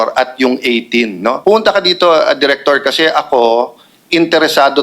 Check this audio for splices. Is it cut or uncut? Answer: cut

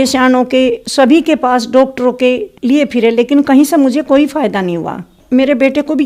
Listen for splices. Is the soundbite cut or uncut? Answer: cut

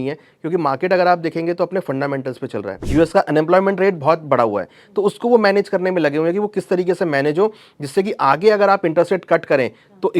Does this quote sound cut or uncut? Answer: cut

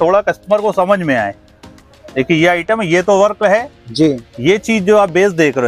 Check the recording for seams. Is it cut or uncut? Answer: uncut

